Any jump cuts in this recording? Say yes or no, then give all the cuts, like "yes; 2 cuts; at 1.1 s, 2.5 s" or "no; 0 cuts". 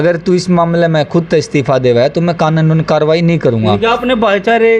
no; 0 cuts